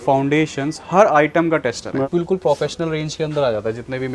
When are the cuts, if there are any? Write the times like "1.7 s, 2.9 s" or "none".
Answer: 2.1 s